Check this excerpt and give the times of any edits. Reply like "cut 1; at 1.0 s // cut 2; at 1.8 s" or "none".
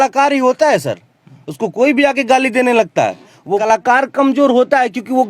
cut 1; at 3.6 s